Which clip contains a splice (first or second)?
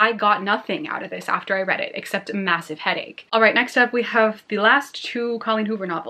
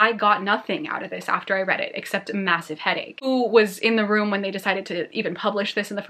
second